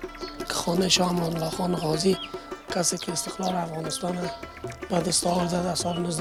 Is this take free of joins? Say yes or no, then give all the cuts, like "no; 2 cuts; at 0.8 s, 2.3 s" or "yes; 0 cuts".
yes; 0 cuts